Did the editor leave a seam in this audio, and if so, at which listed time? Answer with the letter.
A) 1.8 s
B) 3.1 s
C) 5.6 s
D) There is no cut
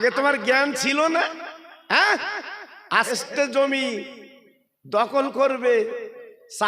B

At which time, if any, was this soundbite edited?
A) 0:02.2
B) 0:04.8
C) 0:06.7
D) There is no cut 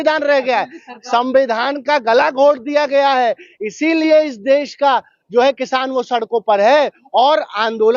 D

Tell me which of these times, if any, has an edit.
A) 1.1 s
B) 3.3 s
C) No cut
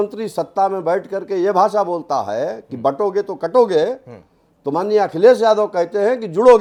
C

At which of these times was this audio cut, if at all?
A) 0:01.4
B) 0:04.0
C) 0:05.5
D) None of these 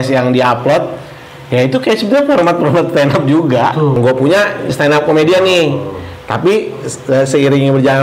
B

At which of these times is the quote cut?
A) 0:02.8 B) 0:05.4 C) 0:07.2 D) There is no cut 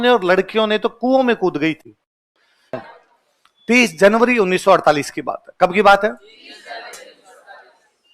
A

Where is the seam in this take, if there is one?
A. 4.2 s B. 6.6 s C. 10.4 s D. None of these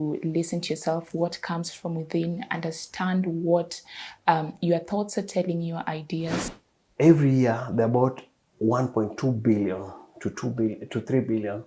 B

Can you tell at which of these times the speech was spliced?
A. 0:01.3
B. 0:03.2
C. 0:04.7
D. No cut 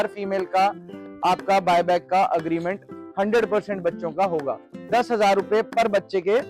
C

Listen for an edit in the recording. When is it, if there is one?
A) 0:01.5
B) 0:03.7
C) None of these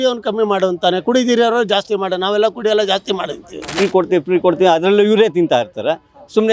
B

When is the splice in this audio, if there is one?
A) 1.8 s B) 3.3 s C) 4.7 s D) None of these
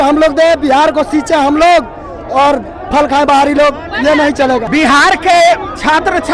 C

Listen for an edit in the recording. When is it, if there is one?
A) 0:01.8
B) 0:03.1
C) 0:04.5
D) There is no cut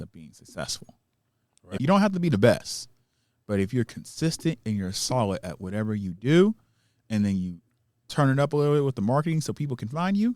A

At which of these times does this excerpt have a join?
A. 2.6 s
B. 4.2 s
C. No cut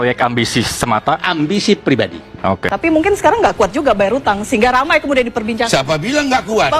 A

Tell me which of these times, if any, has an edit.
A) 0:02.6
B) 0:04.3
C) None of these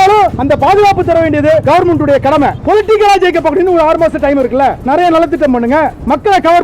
A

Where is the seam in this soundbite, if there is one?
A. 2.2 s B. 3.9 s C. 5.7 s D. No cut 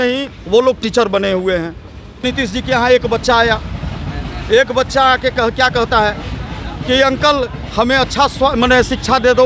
A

